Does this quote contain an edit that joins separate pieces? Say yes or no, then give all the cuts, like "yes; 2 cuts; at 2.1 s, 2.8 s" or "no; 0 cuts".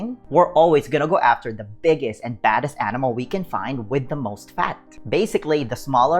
yes; 1 cut; at 4.9 s